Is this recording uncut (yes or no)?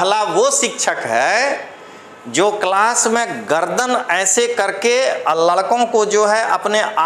yes